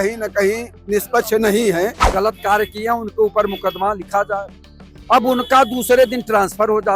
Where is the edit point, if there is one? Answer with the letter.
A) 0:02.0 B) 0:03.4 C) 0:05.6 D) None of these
A